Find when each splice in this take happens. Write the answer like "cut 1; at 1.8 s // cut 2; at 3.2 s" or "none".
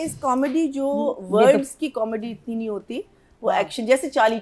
none